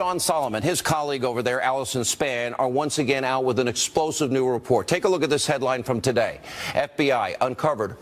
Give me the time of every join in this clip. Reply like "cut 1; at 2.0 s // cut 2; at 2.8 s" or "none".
none